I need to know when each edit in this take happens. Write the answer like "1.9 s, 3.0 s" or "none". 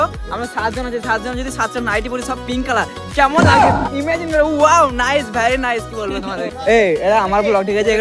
6.5 s